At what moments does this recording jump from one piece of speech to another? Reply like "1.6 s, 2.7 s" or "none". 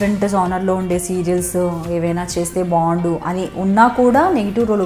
none